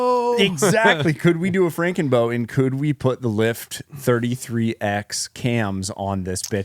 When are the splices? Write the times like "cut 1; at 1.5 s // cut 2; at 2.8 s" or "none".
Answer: none